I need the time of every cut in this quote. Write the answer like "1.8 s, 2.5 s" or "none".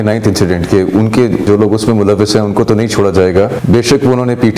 1.4 s, 3.6 s